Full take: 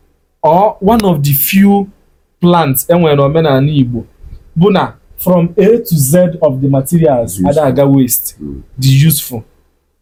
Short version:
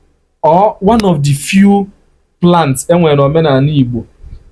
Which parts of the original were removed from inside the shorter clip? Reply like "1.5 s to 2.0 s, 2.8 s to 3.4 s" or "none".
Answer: none